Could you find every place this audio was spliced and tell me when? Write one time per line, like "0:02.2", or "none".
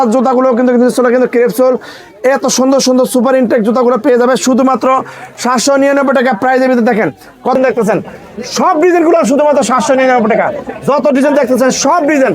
0:07.6